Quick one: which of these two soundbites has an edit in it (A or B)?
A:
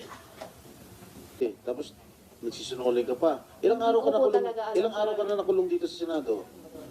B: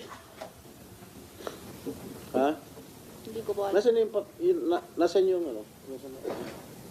A